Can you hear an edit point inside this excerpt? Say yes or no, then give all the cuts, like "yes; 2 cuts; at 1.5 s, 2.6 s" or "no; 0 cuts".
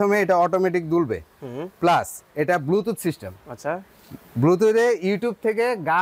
no; 0 cuts